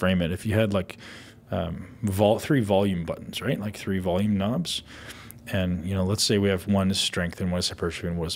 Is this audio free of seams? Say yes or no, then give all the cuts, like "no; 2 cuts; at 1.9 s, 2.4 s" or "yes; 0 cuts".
yes; 0 cuts